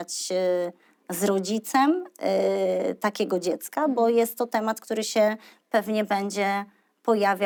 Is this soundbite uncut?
yes; 0 cuts

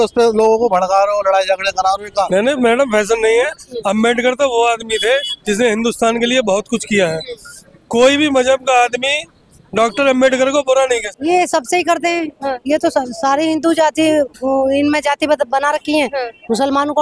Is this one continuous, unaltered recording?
no; 2 cuts; at 2.3 s, 11.1 s

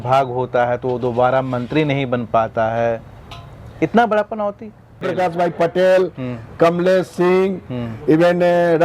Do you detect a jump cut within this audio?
yes; 1 cut; at 5.1 s

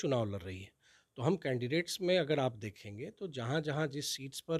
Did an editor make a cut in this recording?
no; 0 cuts

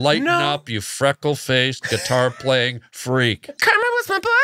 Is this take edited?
yes; 1 cut; at 3.5 s

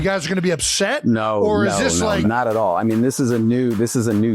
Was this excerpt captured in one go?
no; 1 cut; at 2.2 s

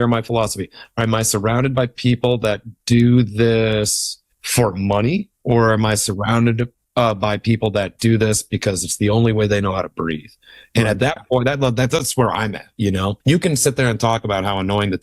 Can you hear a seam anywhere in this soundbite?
no; 0 cuts

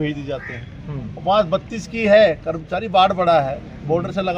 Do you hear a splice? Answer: no; 0 cuts

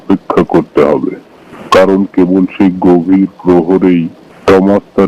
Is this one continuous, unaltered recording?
yes; 0 cuts

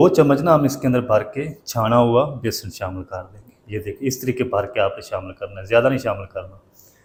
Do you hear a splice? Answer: no; 0 cuts

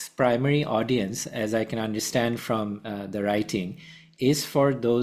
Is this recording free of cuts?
yes; 0 cuts

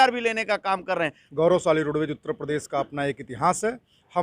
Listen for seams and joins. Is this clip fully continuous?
no; 1 cut; at 1.2 s

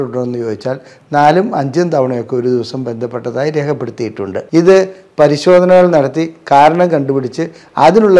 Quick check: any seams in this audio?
yes; 1 cut; at 4.3 s

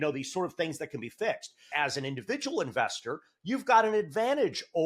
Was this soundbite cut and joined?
yes; 1 cut; at 1.7 s

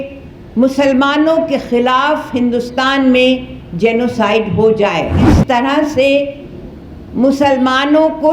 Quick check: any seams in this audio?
yes; 1 cut; at 5.3 s

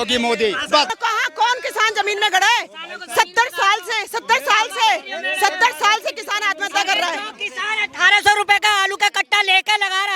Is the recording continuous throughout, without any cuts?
no; 1 cut; at 0.9 s

